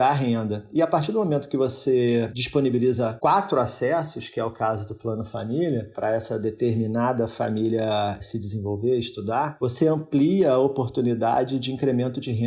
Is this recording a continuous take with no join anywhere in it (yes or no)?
no